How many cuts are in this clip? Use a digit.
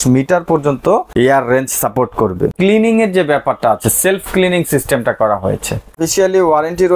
3